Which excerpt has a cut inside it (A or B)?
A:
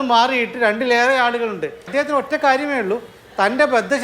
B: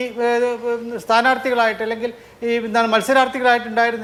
A